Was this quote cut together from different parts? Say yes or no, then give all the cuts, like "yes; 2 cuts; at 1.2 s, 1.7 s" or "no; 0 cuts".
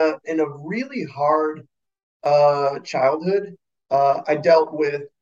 no; 0 cuts